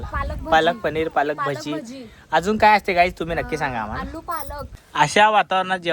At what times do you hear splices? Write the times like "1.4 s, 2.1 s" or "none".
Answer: 4.8 s